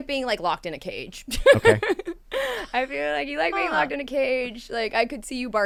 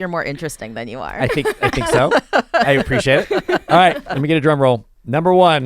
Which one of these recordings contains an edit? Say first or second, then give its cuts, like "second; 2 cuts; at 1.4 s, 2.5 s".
second; 1 cut; at 3.6 s